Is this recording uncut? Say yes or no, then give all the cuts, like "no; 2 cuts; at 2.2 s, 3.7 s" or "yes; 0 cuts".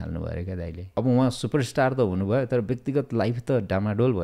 no; 1 cut; at 0.9 s